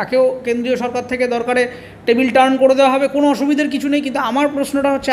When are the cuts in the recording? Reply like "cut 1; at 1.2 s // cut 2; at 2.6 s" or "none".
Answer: none